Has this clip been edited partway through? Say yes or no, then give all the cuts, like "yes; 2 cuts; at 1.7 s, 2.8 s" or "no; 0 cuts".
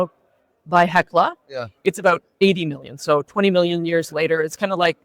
yes; 1 cut; at 2.3 s